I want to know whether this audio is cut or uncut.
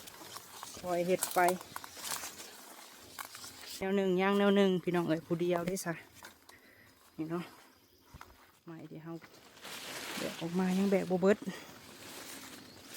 cut